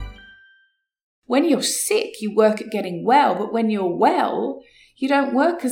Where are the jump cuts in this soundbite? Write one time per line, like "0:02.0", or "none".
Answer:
0:01.1

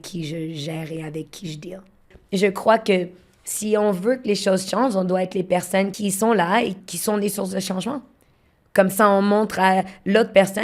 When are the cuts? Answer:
0:02.1
0:05.9
0:06.8

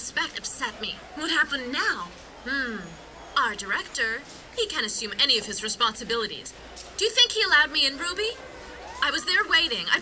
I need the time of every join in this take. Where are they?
none

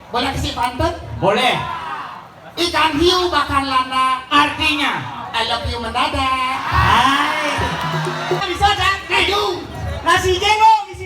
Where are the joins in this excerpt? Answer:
0:08.4

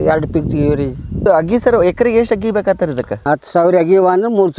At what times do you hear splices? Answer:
0:01.3
0:03.2

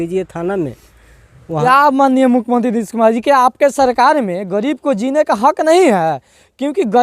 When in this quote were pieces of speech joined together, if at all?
0:01.6

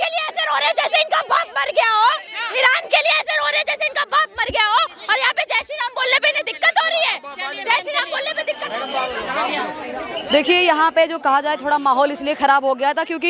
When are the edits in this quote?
none

